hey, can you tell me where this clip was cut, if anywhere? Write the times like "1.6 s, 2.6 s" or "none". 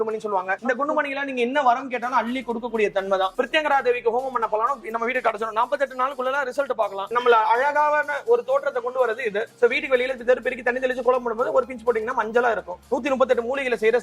3.3 s, 7.1 s, 9.5 s, 12.8 s